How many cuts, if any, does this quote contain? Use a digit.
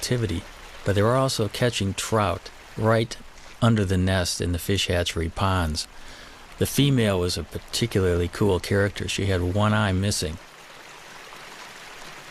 1